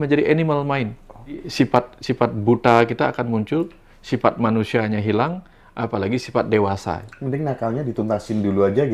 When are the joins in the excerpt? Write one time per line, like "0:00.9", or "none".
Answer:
0:01.5